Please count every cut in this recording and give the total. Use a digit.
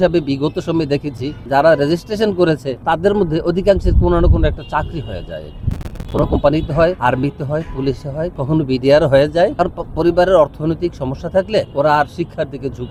0